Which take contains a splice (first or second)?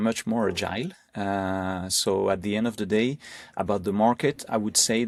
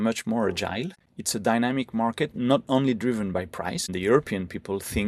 second